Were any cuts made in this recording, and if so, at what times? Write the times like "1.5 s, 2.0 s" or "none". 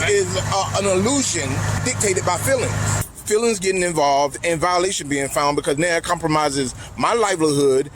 1.8 s, 3.1 s